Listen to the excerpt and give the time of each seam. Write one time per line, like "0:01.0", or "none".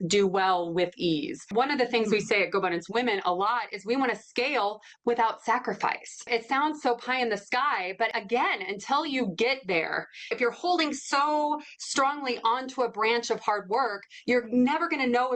0:01.5
0:06.3
0:08.1
0:10.3

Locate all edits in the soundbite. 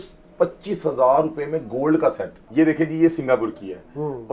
0:02.4

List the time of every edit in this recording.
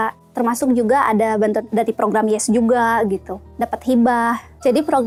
none

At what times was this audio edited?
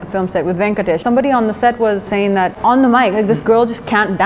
0:01.0
0:02.2

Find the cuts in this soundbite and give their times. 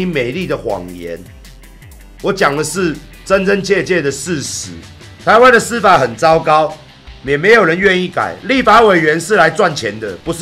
none

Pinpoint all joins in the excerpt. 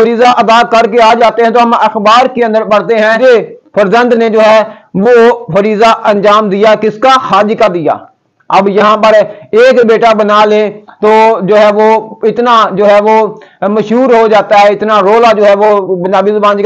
0:03.2

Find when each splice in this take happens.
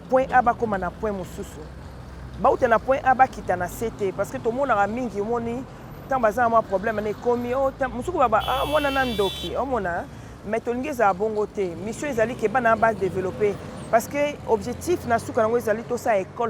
none

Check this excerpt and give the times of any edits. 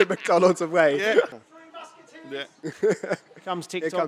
0:01.3

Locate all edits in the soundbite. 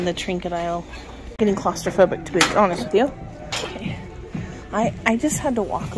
0:01.3
0:03.6

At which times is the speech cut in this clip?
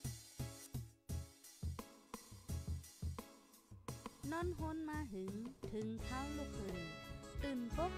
0:00.9

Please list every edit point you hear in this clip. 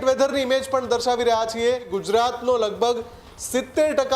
0:01.9

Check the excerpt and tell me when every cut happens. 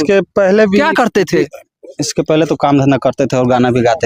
none

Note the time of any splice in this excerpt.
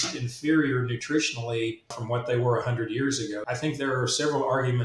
0:01.9
0:03.4

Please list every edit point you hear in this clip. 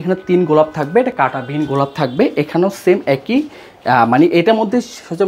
none

